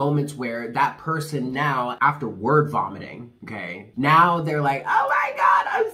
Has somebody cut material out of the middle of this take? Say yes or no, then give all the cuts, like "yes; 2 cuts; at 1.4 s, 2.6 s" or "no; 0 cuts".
yes; 2 cuts; at 1.9 s, 3.8 s